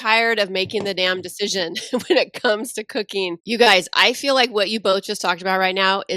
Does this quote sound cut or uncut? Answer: cut